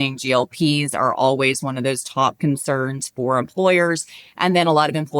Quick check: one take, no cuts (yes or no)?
yes